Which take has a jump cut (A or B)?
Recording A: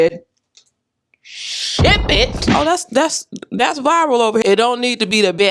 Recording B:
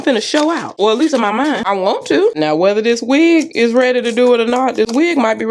A